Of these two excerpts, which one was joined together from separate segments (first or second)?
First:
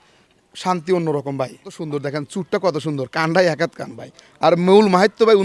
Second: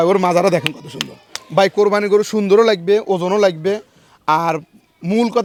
first